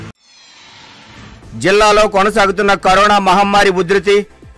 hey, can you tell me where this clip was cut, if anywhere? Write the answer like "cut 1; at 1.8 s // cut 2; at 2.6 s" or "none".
cut 1; at 1.0 s